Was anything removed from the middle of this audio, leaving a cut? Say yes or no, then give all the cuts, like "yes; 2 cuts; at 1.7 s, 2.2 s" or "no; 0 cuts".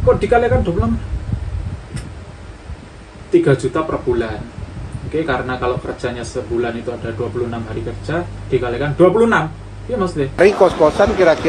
yes; 1 cut; at 10.4 s